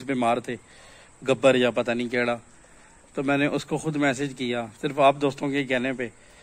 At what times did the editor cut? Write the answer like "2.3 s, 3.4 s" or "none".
none

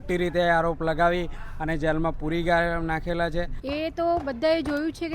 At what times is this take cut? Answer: 3.6 s

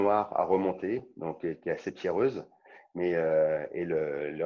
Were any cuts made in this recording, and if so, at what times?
none

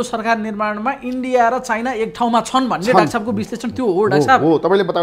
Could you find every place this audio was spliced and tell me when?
none

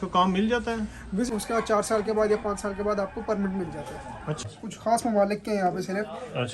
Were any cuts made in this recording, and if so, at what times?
1.3 s, 4.4 s

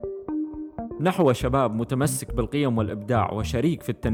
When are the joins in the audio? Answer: 1.0 s

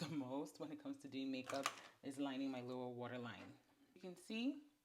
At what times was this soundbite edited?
3.9 s

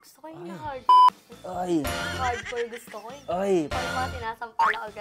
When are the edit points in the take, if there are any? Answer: 3.7 s

